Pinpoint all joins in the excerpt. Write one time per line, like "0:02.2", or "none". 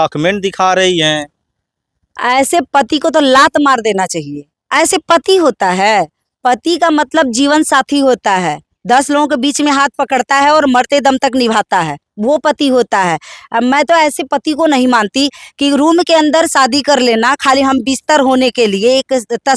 none